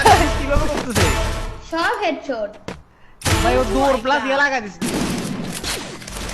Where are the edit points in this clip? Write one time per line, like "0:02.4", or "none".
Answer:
0:02.9
0:04.8